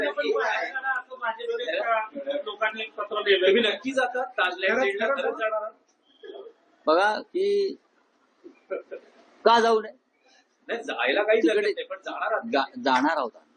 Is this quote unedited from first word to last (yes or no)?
yes